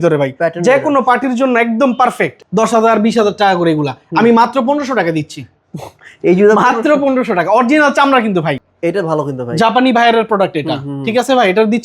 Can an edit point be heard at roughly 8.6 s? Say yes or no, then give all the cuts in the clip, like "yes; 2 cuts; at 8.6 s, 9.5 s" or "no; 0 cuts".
yes; 2 cuts; at 2.3 s, 8.6 s